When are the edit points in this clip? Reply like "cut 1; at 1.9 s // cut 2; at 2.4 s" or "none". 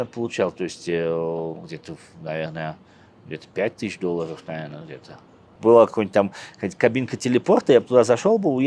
cut 1; at 5.4 s